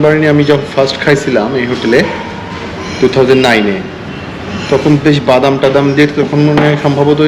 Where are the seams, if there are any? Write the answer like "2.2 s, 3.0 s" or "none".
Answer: none